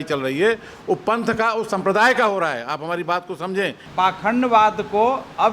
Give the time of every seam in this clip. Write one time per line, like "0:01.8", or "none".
0:03.8